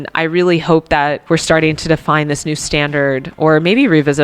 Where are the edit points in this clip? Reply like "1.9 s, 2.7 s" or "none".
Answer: 1.2 s, 3.3 s